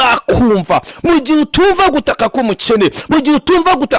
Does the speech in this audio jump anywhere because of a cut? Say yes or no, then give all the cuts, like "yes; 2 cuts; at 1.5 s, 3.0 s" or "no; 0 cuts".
no; 0 cuts